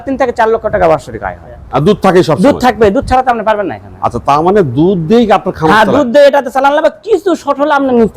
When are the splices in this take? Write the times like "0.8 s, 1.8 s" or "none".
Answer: 1.5 s